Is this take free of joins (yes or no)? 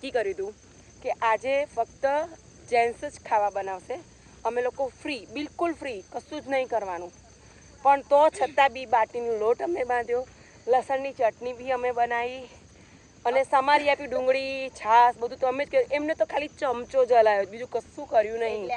yes